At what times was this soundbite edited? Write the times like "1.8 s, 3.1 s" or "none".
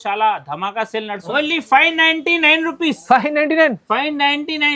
1.2 s